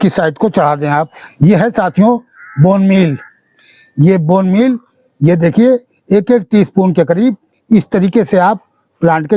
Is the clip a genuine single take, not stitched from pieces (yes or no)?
no